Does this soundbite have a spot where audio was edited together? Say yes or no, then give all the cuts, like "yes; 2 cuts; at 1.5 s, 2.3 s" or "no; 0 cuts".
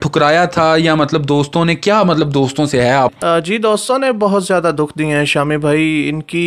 yes; 1 cut; at 3.1 s